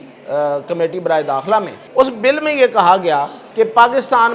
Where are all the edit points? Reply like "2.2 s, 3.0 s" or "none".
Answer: 1.8 s, 3.4 s